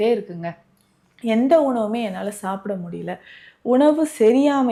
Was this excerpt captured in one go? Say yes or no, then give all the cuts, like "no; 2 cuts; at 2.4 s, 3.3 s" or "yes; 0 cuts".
yes; 0 cuts